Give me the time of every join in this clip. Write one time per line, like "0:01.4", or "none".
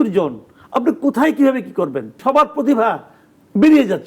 0:02.1